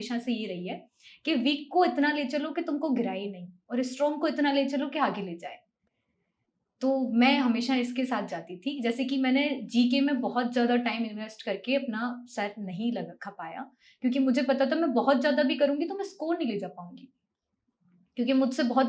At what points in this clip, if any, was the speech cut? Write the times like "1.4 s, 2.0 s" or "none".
none